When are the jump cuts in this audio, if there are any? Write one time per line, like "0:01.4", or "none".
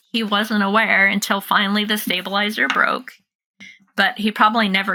none